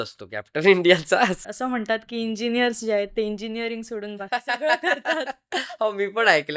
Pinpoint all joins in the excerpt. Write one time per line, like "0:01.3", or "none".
0:01.4

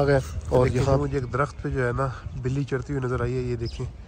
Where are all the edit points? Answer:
0:01.0

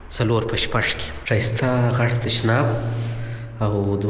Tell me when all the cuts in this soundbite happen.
0:01.1

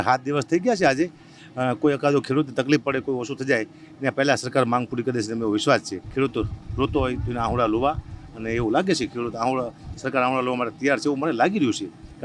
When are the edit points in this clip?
0:06.0

